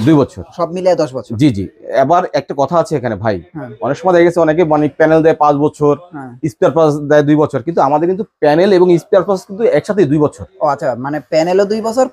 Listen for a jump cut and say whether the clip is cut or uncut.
uncut